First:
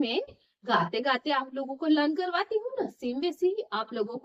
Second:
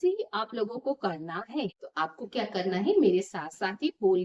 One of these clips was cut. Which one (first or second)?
second